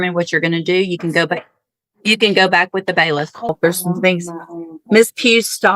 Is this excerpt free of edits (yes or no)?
no